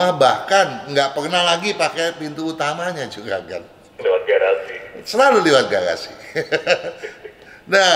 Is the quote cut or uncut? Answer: uncut